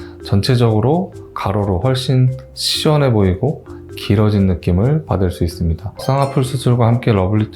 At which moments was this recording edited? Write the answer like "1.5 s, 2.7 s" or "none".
6.0 s